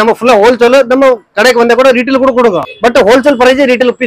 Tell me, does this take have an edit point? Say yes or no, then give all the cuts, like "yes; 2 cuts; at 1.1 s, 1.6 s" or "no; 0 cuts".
yes; 1 cut; at 2.7 s